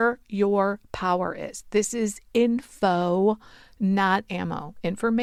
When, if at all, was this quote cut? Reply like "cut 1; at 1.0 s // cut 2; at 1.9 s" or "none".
none